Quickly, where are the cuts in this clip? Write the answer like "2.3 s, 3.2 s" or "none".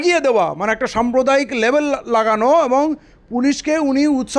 none